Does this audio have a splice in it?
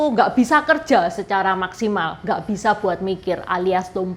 no; 0 cuts

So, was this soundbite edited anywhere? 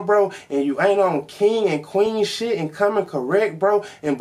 no; 0 cuts

